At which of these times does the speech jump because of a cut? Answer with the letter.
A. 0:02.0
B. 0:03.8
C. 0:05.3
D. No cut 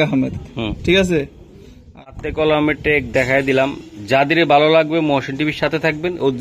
A